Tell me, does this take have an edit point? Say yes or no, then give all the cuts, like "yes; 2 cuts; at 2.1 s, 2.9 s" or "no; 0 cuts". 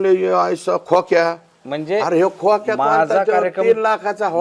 no; 0 cuts